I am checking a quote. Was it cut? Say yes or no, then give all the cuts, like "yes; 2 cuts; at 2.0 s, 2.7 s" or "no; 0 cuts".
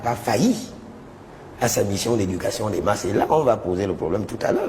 no; 0 cuts